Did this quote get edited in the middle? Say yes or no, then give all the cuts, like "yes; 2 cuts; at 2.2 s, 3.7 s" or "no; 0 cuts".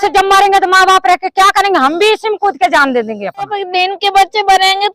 yes; 1 cut; at 3.6 s